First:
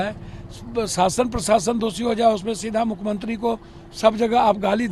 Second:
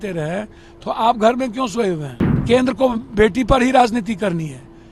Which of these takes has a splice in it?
second; 1 cut; at 2.4 s

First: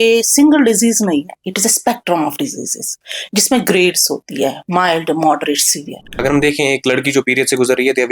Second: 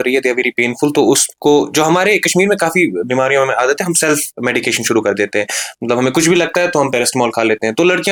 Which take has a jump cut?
first; 1 cut; at 6.2 s

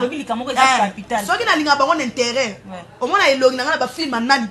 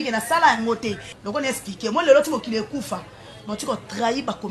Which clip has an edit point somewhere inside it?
second; 1 cut; at 1.1 s

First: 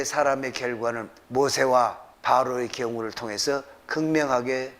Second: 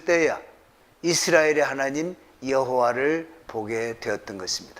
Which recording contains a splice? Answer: first; 2 cuts; at 1.1 s, 2.1 s

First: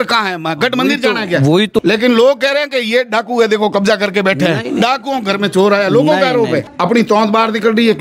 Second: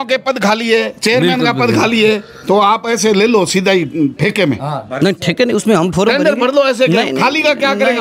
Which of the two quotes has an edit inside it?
first; 2 cuts; at 1.8 s, 6.6 s

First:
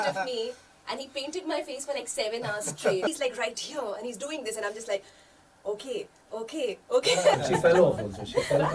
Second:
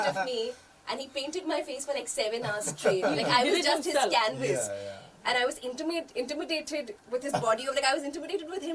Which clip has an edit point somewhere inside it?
first; 2 cuts; at 3.1 s, 7.4 s

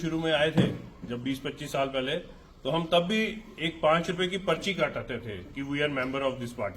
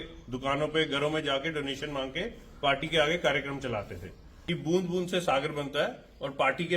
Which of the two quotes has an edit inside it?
second; 1 cut; at 4.2 s

